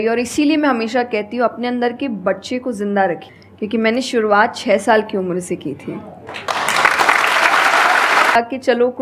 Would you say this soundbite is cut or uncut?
cut